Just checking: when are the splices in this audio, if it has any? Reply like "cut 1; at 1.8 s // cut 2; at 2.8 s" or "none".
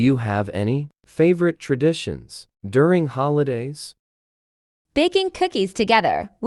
cut 1; at 0.9 s

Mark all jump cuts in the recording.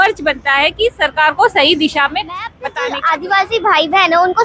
cut 1; at 2.6 s

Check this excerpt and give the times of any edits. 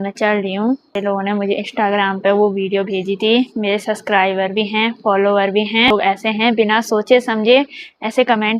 cut 1; at 1.0 s // cut 2; at 5.9 s

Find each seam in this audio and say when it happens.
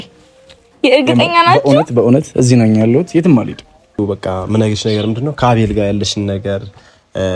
cut 1; at 4.0 s

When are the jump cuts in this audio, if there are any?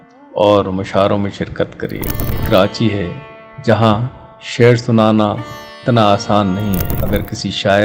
cut 1; at 2.4 s // cut 2; at 6.9 s

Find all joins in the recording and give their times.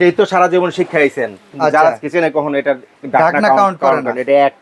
none

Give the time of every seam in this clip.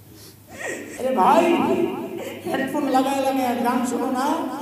cut 1; at 1.0 s

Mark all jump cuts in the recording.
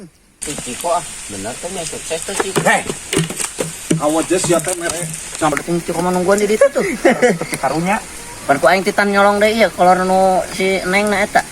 cut 1; at 5.5 s

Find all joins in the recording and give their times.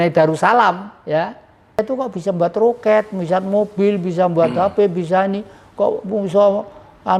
cut 1; at 1.8 s

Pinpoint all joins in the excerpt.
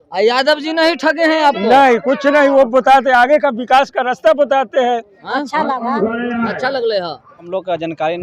cut 1; at 5.2 s // cut 2; at 7.5 s

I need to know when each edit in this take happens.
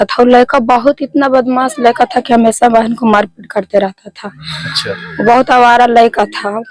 none

